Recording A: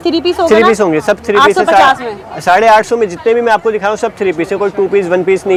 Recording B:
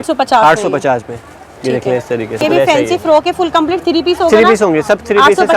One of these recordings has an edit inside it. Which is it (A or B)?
B